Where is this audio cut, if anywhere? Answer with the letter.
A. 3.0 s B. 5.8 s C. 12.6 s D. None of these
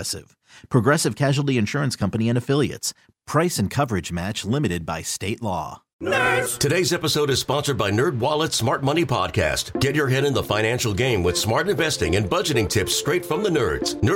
B